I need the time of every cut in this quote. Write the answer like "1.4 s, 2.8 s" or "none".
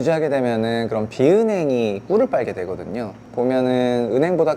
3.2 s